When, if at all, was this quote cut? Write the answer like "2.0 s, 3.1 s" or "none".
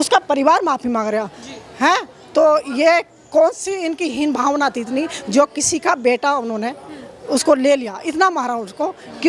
none